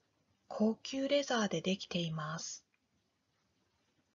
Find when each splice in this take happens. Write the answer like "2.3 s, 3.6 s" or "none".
none